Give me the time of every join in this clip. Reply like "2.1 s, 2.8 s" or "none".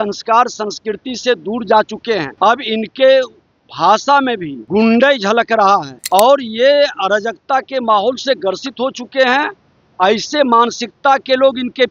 2.3 s, 4.5 s, 5.9 s